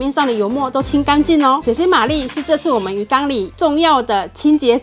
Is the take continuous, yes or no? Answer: no